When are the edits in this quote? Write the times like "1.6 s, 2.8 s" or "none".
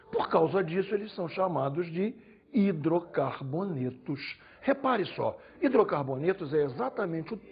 none